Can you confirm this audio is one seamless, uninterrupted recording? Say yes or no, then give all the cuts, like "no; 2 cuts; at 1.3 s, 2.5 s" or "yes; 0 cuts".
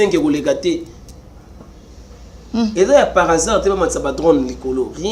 yes; 0 cuts